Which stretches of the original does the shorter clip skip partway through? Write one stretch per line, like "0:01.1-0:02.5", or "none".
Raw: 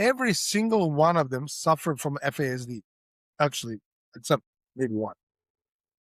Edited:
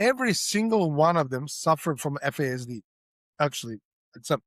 none